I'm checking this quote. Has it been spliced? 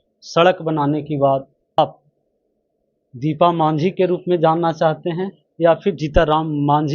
yes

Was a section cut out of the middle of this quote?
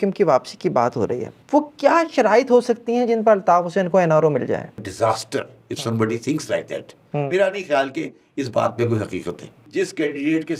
yes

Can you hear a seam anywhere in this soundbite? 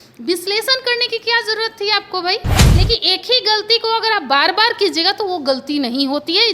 yes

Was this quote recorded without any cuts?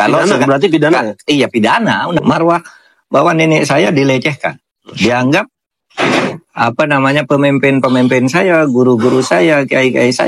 no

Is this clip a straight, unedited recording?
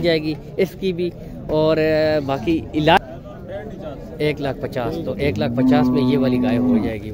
no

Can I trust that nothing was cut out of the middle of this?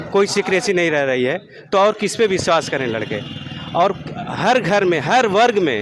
yes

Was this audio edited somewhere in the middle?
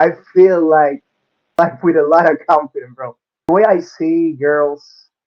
yes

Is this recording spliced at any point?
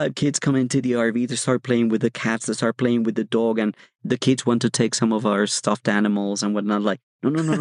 yes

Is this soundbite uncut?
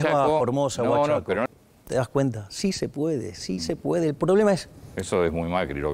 no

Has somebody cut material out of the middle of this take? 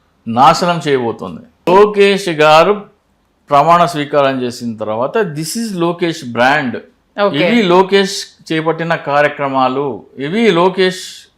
yes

